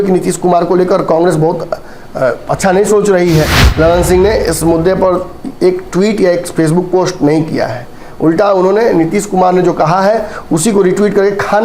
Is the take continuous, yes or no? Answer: no